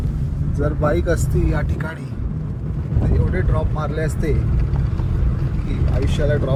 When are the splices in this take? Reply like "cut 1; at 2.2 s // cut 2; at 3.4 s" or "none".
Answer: none